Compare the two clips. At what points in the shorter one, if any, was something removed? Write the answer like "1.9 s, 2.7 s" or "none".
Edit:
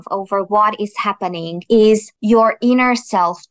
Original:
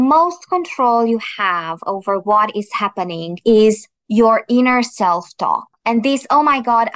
2.1 s